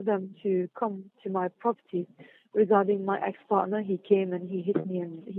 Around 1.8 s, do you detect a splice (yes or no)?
no